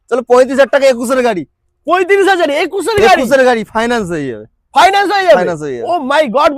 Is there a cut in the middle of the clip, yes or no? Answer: no